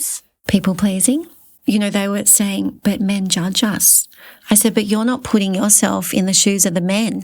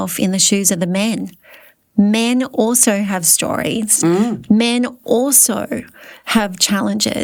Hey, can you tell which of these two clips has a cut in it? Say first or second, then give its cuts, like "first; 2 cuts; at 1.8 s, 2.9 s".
first; 1 cut; at 1.5 s